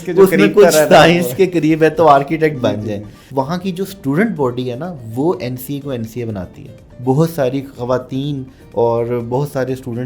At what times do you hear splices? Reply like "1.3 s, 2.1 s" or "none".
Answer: 3.1 s, 6.9 s